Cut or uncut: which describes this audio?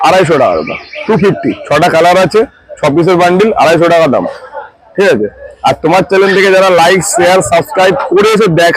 uncut